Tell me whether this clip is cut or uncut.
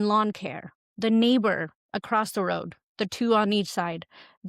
uncut